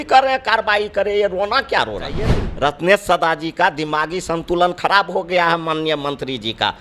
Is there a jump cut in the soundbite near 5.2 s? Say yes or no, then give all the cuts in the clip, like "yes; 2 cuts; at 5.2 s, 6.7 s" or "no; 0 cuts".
no; 1 cut; at 2.4 s